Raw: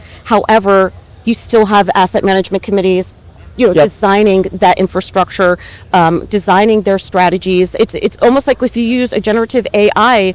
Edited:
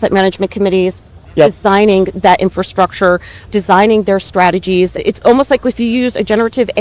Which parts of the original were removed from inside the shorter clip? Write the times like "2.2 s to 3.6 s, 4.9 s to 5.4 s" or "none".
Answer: 3.5 s to 3.7 s, 5.8 s to 6.2 s, 7.7 s to 7.9 s